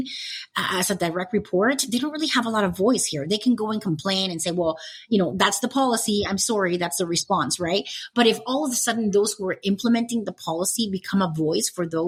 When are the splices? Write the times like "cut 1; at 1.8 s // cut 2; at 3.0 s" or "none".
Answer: none